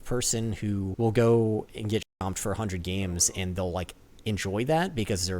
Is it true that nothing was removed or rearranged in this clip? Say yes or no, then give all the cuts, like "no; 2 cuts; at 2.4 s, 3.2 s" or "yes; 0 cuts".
no; 2 cuts; at 0.9 s, 2.1 s